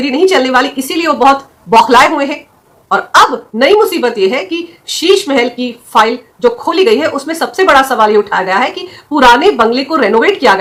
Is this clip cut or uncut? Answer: uncut